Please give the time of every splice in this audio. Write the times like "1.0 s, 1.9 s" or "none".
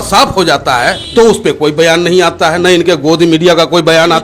1.0 s